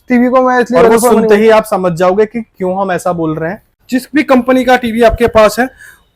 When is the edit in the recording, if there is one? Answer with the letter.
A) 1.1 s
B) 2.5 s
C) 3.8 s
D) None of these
C